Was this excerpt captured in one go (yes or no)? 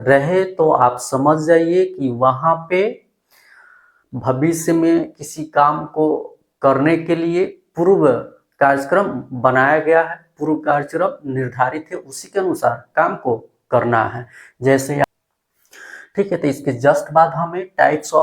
no